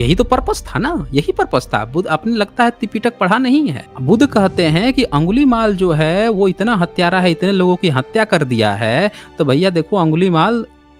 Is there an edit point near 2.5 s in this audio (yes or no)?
no